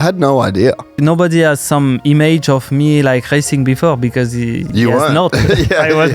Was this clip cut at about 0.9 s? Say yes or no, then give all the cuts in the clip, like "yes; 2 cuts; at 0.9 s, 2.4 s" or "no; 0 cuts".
yes; 2 cuts; at 0.9 s, 4.7 s